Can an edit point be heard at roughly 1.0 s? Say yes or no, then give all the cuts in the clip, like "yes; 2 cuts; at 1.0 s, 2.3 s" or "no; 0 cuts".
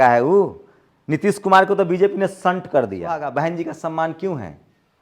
no; 1 cut; at 3.3 s